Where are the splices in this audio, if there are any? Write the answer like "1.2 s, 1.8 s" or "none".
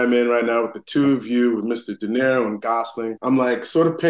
3.2 s